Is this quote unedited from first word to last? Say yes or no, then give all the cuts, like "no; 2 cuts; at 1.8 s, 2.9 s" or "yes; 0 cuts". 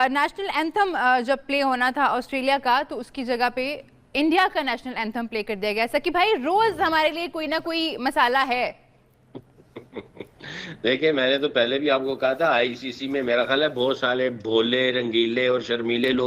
yes; 0 cuts